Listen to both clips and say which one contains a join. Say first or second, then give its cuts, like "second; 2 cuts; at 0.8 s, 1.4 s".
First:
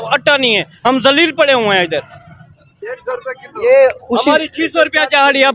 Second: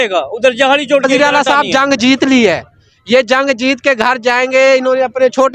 second; 1 cut; at 1.1 s